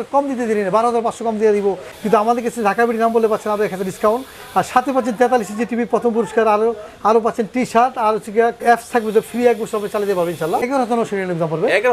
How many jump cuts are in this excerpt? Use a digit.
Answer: 3